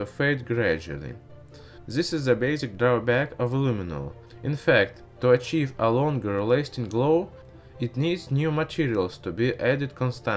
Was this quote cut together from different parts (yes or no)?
yes